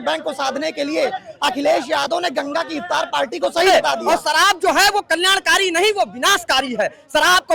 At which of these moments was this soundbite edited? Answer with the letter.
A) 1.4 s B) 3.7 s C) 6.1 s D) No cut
B